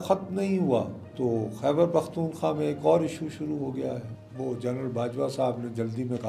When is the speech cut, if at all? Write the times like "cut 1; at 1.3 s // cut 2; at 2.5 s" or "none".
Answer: cut 1; at 1.0 s // cut 2; at 4.2 s

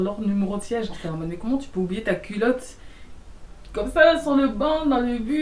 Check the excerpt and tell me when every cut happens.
cut 1; at 1.0 s

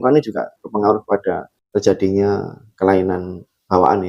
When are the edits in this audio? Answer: cut 1; at 1.5 s

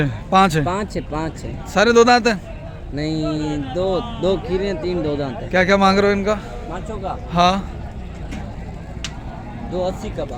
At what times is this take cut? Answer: none

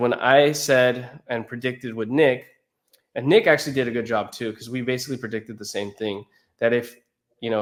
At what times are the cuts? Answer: none

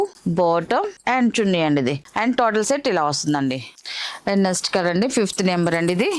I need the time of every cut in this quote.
none

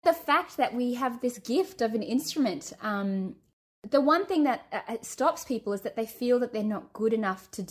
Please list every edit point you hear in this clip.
cut 1; at 3.6 s

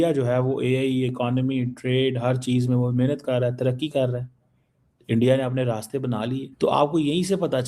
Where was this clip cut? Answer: cut 1; at 6.5 s

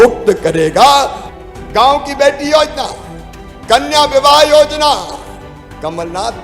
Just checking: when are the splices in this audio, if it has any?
cut 1; at 1.2 s

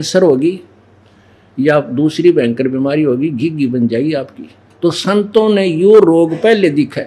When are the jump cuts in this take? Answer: cut 1; at 4.6 s

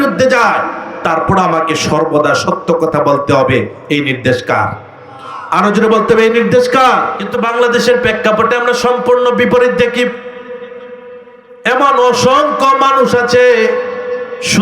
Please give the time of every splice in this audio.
cut 1; at 7.2 s

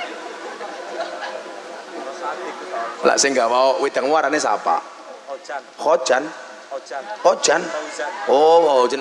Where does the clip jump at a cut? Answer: none

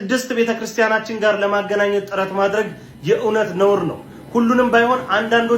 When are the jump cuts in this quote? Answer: none

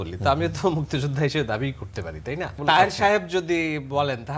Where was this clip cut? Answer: cut 1; at 2.6 s

